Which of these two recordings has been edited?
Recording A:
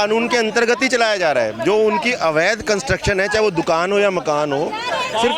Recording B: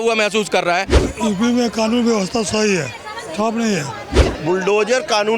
B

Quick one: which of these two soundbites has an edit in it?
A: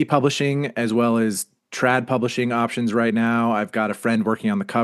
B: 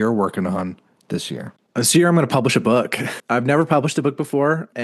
B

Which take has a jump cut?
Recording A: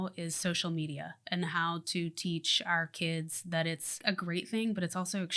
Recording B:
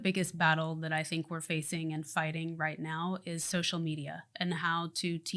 A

